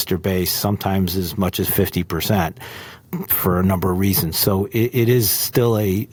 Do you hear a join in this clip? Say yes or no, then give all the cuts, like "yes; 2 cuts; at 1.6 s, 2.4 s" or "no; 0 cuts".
no; 0 cuts